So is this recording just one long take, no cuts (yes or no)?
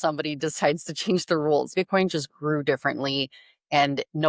no